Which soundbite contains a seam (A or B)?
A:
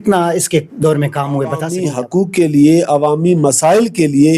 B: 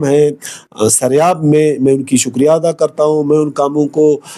A